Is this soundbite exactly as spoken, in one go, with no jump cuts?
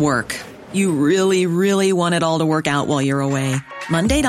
yes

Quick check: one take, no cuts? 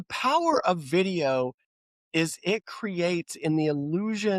yes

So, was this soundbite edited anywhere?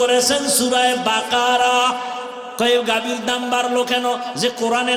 yes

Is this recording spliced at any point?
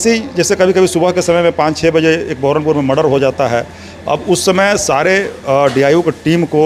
no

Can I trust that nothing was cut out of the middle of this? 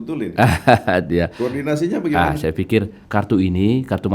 no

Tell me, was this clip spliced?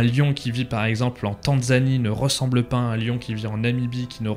no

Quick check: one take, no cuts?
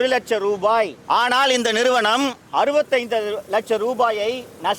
no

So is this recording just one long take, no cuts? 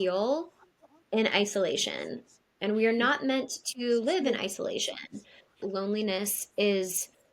no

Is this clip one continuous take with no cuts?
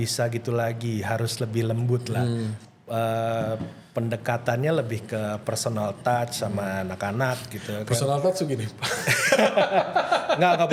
yes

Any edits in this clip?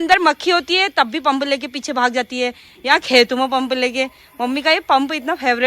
no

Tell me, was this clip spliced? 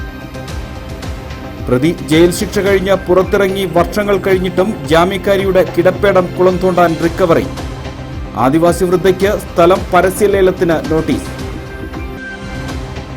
no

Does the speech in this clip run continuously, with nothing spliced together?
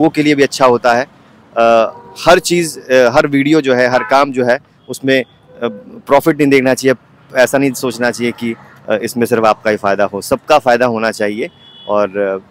yes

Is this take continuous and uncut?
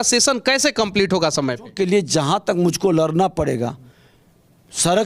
no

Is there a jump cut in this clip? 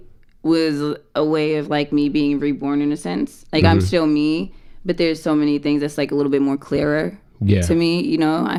no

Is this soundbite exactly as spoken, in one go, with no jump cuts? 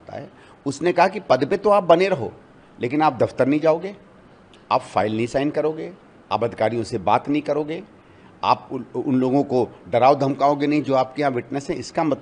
yes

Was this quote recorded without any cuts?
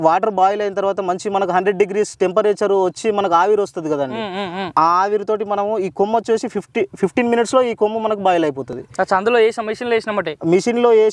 yes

